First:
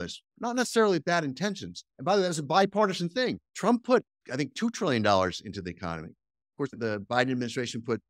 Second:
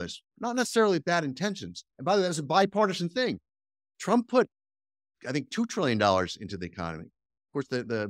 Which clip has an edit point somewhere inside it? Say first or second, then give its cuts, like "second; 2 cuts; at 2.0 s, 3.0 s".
first; 3 cuts; at 3.5 s, 4.2 s, 6.7 s